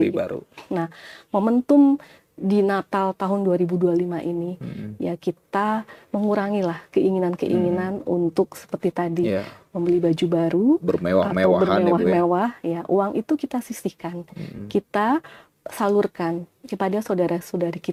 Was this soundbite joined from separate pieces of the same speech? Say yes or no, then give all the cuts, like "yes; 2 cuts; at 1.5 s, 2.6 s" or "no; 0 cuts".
no; 0 cuts